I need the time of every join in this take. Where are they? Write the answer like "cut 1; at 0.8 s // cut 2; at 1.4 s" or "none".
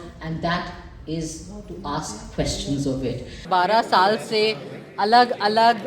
cut 1; at 3.4 s